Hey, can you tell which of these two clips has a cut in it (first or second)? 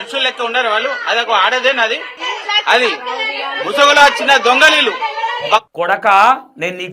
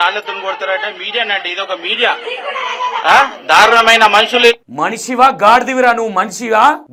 first